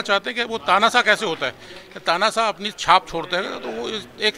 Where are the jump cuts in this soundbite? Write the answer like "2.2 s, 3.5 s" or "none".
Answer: none